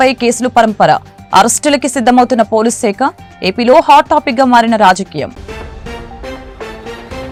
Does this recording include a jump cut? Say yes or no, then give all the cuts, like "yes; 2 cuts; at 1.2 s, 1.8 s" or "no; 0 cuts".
no; 0 cuts